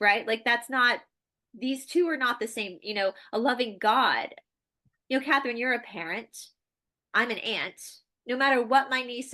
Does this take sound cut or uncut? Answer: uncut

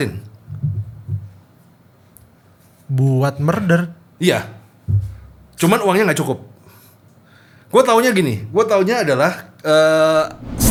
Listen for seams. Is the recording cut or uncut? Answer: uncut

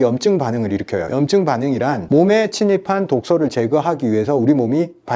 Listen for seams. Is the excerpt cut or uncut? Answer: uncut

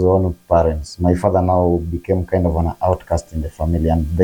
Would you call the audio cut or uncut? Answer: uncut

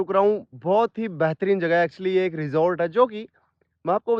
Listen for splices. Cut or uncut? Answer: uncut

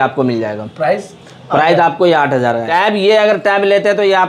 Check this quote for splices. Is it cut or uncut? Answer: cut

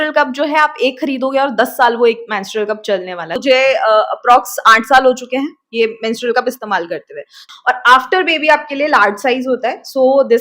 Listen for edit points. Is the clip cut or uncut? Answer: cut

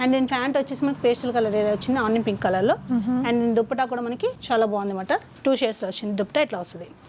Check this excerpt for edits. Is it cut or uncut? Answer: uncut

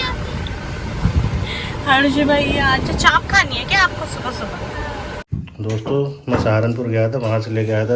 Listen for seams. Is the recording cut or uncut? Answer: cut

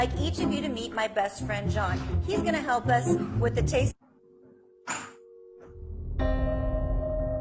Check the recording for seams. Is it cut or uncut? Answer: cut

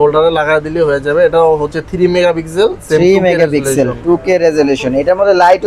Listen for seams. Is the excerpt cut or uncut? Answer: uncut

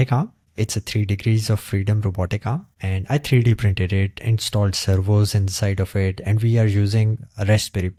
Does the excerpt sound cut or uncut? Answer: uncut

